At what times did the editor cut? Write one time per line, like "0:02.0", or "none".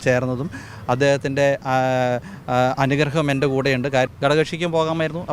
0:04.1